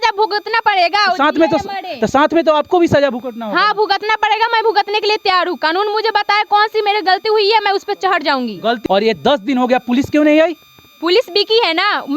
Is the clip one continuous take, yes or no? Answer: no